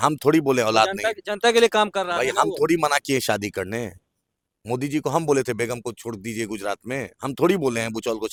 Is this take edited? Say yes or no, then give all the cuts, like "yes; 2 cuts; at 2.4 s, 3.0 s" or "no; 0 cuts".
no; 0 cuts